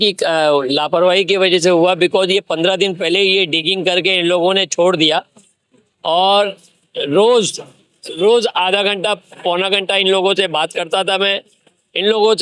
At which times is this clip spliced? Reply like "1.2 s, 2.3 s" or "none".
none